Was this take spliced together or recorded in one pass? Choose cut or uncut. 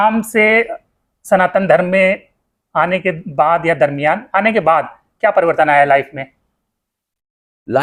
uncut